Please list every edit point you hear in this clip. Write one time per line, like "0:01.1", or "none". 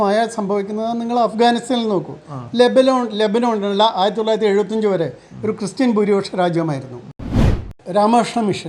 0:07.5